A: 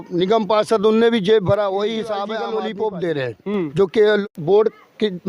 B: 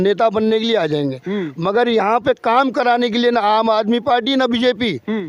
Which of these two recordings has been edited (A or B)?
A